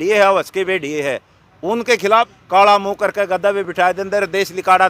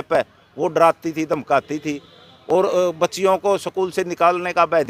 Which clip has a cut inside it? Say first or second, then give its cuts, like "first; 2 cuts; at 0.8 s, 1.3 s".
first; 1 cut; at 2.4 s